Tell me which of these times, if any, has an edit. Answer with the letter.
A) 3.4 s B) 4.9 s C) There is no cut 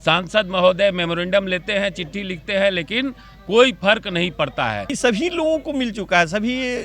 B